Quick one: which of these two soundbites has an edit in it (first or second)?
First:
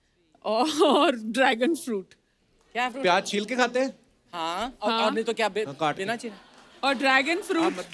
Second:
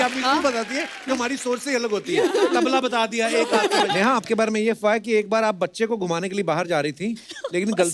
second